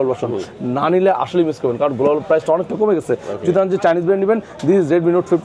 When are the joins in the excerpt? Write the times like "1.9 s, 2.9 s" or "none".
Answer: none